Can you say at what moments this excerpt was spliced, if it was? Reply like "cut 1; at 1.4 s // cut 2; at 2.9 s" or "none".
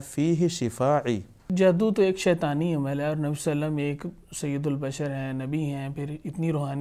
cut 1; at 1.4 s